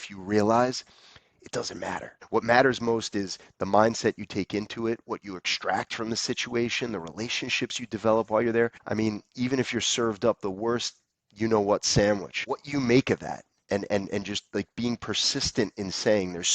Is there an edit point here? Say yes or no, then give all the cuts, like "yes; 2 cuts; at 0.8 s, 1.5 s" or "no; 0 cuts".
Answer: yes; 3 cuts; at 2.1 s, 8.8 s, 12.3 s